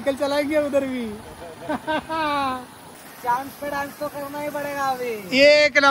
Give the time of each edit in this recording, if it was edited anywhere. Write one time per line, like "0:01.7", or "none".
none